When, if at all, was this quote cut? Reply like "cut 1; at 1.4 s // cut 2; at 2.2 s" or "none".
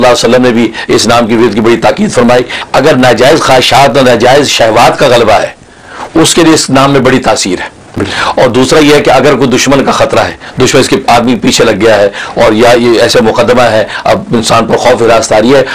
cut 1; at 2.6 s // cut 2; at 8.0 s